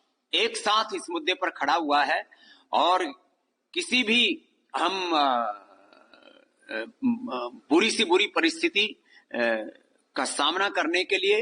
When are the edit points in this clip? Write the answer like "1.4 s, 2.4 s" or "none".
none